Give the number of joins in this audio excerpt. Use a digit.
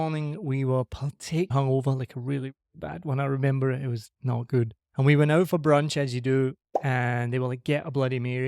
2